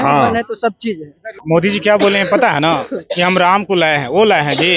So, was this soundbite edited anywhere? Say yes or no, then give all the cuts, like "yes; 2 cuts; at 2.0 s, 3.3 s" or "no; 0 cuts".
no; 0 cuts